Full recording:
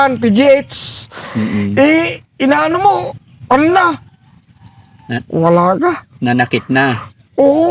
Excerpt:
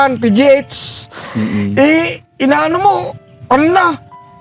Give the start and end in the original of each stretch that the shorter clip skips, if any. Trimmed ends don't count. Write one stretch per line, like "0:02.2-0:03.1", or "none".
none